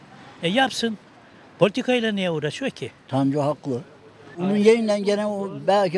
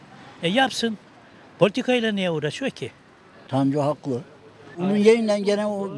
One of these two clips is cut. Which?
first; 1 cut; at 2.9 s

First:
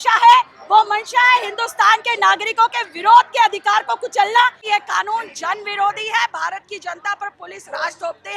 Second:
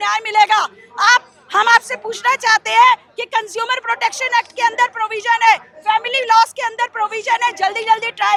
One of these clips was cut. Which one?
first; 1 cut; at 4.6 s

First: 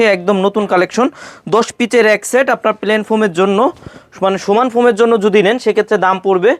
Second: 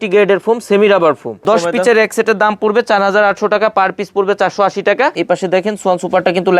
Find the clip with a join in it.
second; 2 cuts; at 1.3 s, 5.2 s

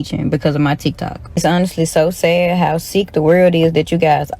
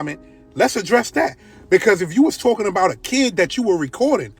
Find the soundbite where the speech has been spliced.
first; 1 cut; at 1.2 s

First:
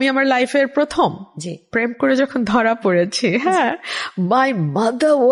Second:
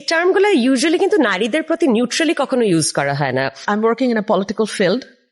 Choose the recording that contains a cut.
second; 1 cut; at 3.6 s

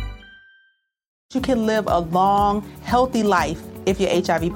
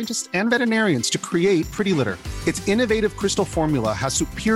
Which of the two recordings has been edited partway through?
first; 1 cut; at 1.2 s

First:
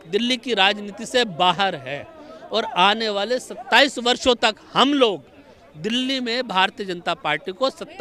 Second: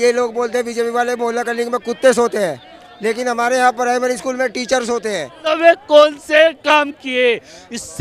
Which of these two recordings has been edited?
second; 1 cut; at 5.5 s

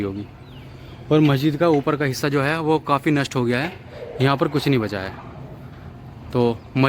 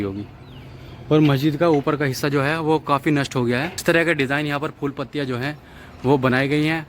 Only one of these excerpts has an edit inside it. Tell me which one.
second; 1 cut; at 3.7 s

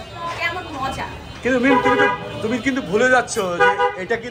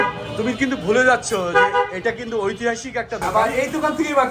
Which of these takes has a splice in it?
second; 1 cut; at 3.3 s

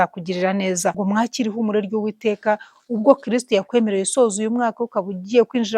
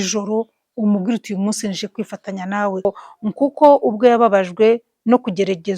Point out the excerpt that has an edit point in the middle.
second; 1 cut; at 2.9 s

